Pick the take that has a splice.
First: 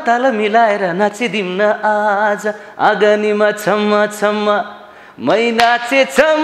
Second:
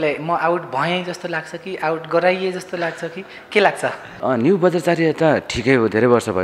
second; 1 cut; at 4.1 s

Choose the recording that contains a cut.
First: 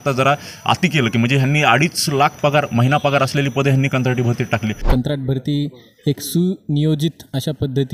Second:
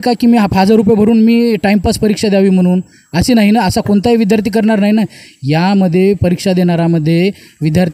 first; 1 cut; at 4.8 s

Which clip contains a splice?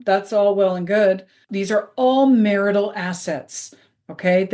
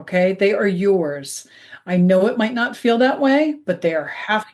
first; 1 cut; at 1.4 s

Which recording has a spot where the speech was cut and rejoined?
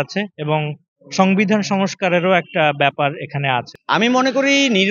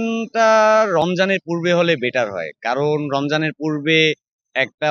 first; 1 cut; at 3.8 s

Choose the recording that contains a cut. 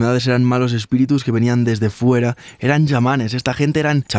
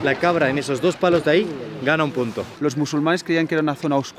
second; 1 cut; at 2.5 s

